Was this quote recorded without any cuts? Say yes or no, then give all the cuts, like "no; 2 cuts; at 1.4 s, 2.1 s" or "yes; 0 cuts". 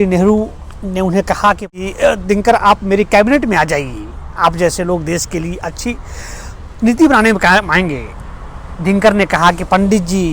no; 1 cut; at 1.7 s